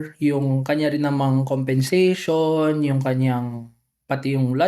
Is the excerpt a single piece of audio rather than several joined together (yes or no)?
yes